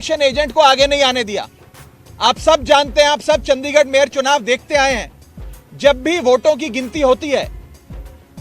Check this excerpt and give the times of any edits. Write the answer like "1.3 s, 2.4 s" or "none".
none